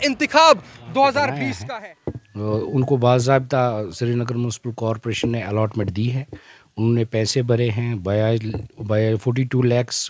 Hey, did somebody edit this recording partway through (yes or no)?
yes